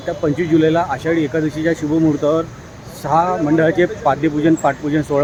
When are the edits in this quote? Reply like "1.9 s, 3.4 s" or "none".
none